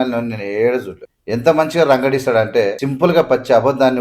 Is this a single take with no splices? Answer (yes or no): no